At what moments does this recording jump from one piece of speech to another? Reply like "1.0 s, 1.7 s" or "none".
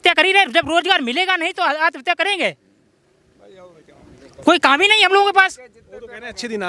none